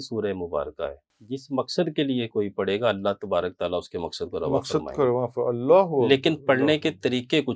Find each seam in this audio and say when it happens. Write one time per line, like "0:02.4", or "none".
0:01.1

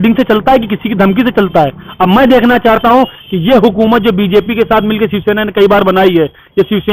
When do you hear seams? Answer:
none

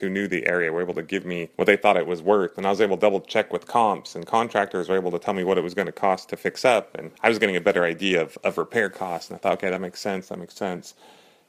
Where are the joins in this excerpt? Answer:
0:01.5
0:07.0

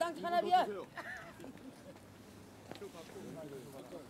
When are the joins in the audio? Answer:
none

